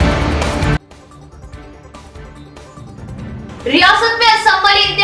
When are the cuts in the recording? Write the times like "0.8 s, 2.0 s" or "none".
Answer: 2.6 s

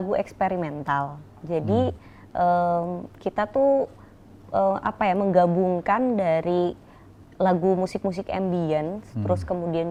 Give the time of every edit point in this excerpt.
none

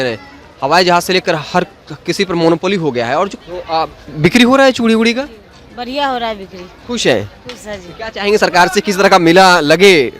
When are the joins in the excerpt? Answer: 3.4 s

